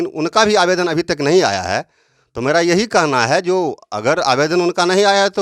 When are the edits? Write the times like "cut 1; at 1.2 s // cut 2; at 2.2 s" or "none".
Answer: none